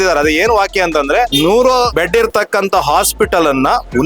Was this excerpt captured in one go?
no; 2 cuts; at 1.3 s, 1.9 s

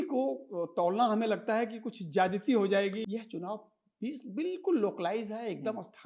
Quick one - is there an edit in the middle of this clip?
yes; 1 cut; at 3.0 s

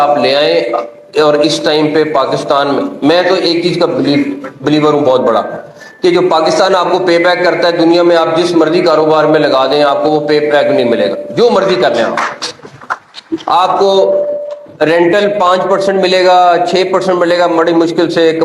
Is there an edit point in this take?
yes; 1 cut; at 17.0 s

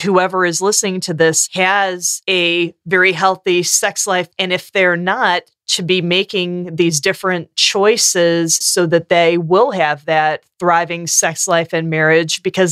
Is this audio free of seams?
no; 2 cuts; at 4.3 s, 8.7 s

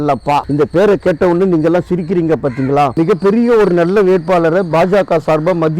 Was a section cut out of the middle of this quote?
yes; 1 cut; at 3.0 s

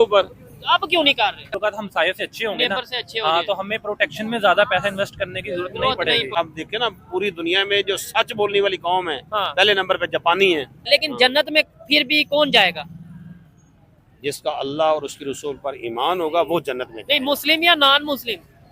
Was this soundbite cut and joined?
yes; 3 cuts; at 1.5 s, 6.3 s, 10.8 s

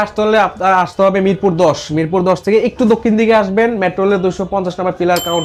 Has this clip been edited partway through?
no; 0 cuts

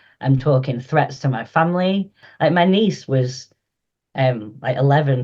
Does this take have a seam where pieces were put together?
yes; 1 cut; at 2.2 s

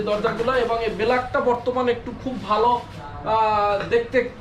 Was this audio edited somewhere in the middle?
no; 0 cuts

